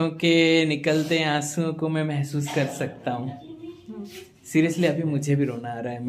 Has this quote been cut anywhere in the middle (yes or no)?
no